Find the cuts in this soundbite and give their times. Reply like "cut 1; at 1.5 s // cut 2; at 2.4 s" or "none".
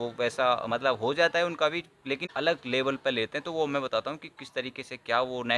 none